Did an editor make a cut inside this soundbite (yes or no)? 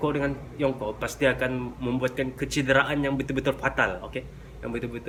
no